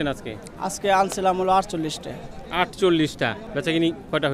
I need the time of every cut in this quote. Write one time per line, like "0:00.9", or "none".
0:03.4